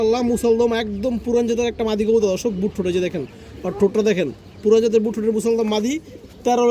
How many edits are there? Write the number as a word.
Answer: zero